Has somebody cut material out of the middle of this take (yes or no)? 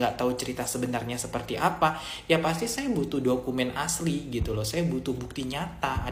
no